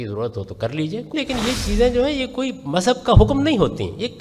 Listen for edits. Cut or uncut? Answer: cut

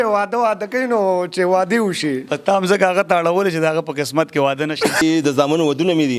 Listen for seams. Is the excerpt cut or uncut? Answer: cut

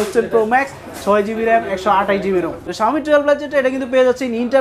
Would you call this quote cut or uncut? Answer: cut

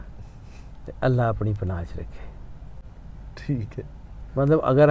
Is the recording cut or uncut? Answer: uncut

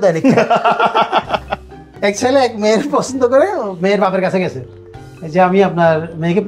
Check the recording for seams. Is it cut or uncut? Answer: cut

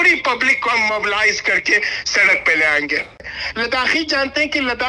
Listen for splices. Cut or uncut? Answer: cut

